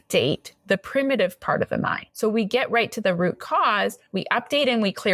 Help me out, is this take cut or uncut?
uncut